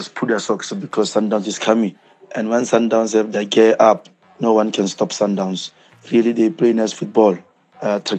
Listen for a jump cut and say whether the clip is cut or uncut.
uncut